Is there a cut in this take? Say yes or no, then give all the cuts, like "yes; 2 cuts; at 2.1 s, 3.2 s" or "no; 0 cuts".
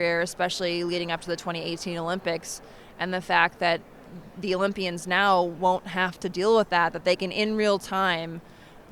no; 0 cuts